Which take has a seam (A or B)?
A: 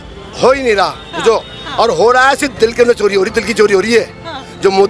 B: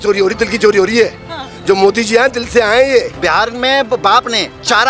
B